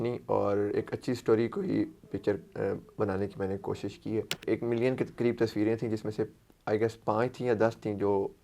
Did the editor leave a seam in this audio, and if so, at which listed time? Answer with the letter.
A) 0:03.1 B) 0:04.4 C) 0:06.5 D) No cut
B